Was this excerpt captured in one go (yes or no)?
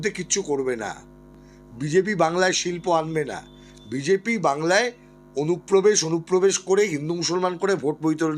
yes